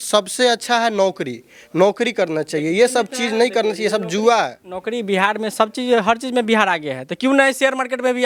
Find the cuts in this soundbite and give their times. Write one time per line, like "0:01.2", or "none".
none